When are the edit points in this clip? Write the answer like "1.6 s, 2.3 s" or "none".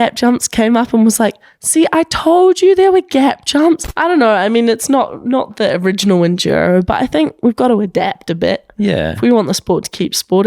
3.9 s